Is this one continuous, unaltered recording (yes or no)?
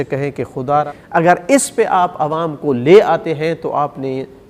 no